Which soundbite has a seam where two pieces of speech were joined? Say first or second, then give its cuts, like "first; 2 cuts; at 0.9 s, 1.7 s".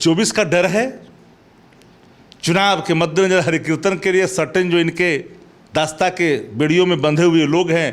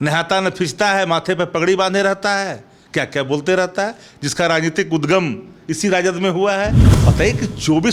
second; 1 cut; at 7.0 s